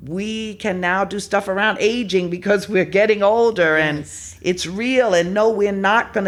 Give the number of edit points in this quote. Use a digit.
0